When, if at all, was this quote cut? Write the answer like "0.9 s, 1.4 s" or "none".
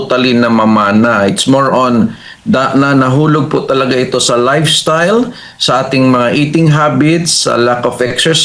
none